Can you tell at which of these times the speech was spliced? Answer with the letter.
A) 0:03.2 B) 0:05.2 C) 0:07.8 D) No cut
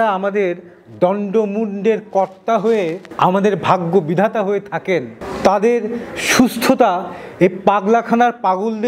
D